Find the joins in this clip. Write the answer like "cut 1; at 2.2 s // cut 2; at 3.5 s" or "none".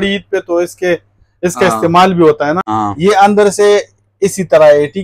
cut 1; at 2.6 s